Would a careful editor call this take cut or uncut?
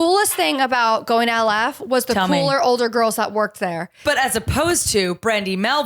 cut